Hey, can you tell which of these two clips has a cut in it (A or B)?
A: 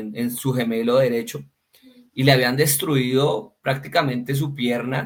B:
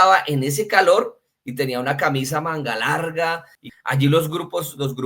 B